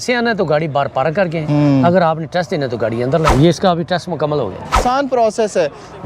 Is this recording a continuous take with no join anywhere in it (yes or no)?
no